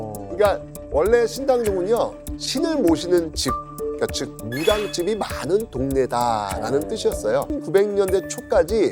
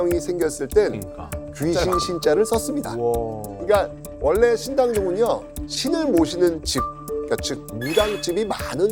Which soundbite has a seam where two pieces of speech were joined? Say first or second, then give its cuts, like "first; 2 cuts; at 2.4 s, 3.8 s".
first; 1 cut; at 7.5 s